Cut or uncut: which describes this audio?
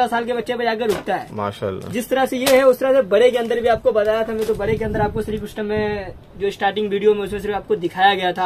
uncut